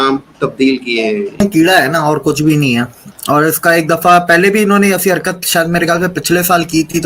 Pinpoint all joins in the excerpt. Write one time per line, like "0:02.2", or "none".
0:01.4